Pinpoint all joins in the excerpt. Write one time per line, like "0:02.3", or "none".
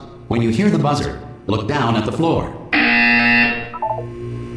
0:01.3